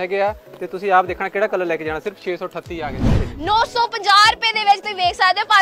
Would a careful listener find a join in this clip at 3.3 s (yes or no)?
yes